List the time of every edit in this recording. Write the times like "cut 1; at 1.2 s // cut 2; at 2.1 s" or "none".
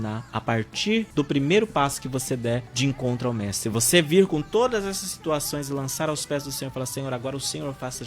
cut 1; at 1.1 s // cut 2; at 2.7 s

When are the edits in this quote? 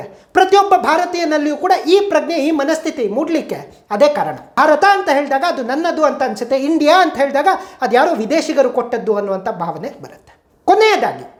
none

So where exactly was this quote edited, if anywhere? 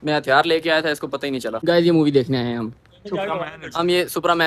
cut 1; at 1.5 s

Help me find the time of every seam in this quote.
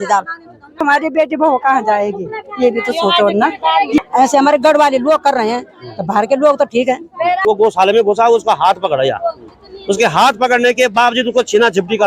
cut 1; at 0.8 s // cut 2; at 4.0 s // cut 3; at 7.4 s

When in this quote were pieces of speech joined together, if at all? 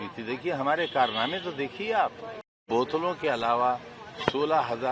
cut 1; at 2.6 s

